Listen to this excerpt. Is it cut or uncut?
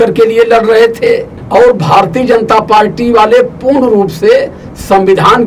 cut